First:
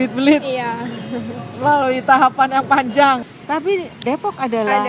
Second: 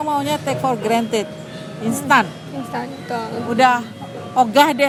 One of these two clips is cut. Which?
first; 1 cut; at 3.3 s

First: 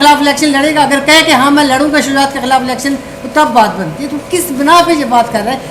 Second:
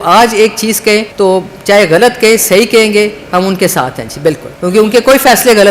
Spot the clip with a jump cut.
second; 2 cuts; at 1.1 s, 4.5 s

